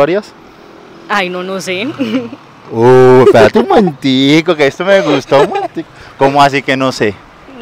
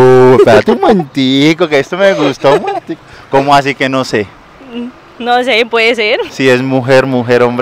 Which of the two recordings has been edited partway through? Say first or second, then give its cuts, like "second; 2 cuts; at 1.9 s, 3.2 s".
second; 1 cut; at 6.3 s